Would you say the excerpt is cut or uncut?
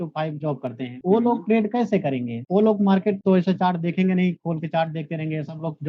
cut